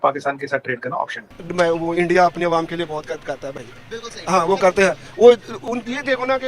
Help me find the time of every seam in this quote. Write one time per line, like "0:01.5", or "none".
0:01.2